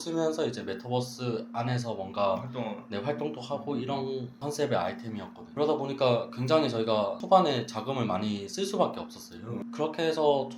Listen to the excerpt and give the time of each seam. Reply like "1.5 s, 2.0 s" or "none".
5.4 s, 7.2 s